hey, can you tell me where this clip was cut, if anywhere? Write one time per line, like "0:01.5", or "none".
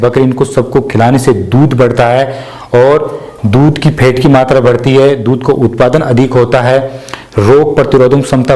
none